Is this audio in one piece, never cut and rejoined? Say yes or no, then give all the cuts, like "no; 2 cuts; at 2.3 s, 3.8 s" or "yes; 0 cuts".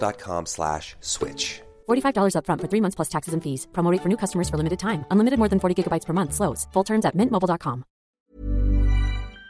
no; 1 cut; at 8.3 s